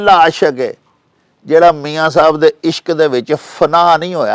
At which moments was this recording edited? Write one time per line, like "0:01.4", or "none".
none